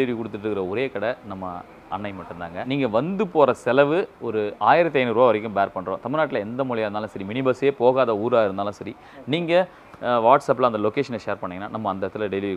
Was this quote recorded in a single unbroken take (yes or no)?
no